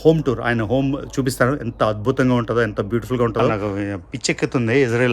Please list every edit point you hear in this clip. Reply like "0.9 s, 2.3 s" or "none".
3.5 s